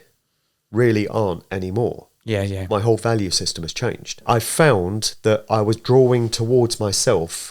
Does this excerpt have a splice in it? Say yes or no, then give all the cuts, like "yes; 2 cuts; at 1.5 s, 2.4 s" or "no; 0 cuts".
yes; 1 cut; at 4.2 s